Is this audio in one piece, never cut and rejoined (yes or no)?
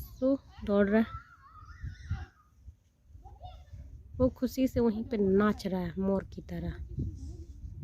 yes